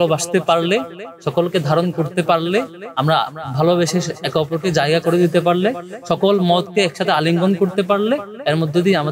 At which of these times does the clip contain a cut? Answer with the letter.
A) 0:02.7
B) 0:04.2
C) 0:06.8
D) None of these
D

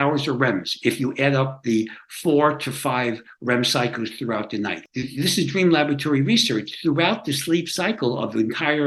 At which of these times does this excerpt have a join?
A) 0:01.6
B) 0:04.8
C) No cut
B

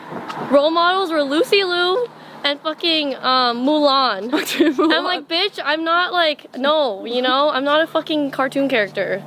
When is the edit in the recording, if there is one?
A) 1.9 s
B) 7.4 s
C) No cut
C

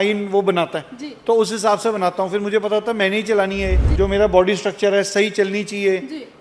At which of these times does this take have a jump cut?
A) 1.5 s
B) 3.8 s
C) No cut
B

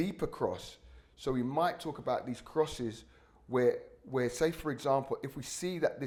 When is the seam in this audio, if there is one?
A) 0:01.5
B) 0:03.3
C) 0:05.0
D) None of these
D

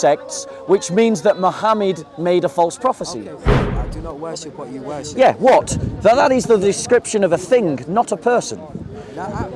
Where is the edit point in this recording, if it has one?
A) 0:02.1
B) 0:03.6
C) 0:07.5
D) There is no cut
B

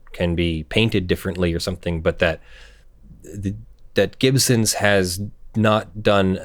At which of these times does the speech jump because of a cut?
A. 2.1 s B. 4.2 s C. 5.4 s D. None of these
D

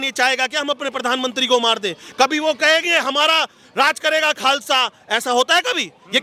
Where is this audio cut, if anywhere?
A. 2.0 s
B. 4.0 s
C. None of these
C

